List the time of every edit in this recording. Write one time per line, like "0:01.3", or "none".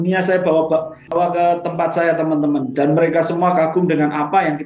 0:01.2